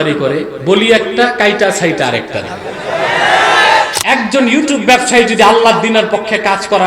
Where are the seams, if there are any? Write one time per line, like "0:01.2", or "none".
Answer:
0:03.9